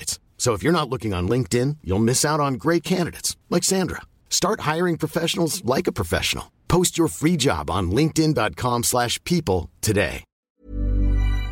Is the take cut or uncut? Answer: cut